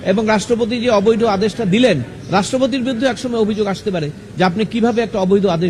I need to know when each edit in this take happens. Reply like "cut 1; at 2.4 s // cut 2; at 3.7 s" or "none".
none